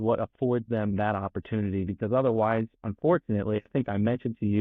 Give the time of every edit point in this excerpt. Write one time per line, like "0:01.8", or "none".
none